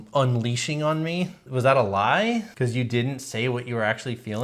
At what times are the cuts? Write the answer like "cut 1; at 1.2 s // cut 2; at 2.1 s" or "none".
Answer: cut 1; at 1.4 s // cut 2; at 2.5 s